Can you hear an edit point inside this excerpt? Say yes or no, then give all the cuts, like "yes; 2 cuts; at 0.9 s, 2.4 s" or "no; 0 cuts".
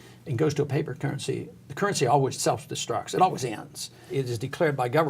yes; 2 cuts; at 2.4 s, 4.1 s